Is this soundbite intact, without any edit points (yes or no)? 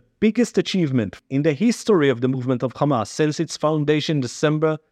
no